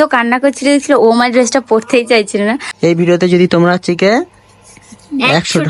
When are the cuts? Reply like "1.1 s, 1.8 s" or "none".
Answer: 2.7 s